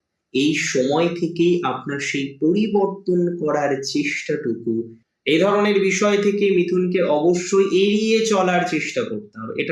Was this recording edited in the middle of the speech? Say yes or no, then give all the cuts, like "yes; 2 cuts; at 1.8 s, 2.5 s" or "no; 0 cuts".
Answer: yes; 1 cut; at 5.0 s